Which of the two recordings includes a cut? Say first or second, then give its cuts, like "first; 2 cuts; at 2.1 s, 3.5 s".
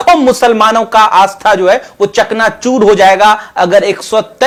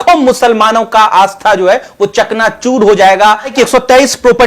second; 1 cut; at 3.5 s